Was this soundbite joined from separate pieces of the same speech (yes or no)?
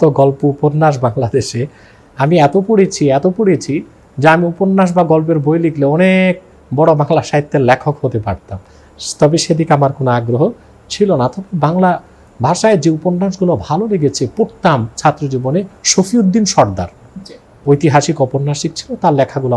no